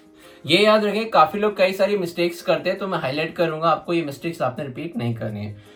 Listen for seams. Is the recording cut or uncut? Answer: uncut